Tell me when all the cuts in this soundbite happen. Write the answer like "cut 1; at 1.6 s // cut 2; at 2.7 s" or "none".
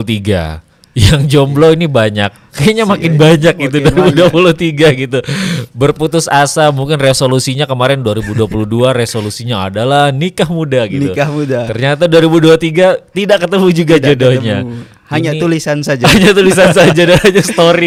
none